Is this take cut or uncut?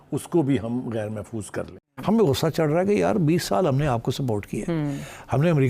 cut